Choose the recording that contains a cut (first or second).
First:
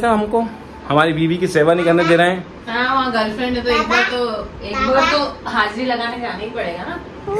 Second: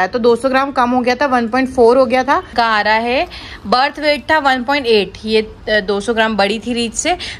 second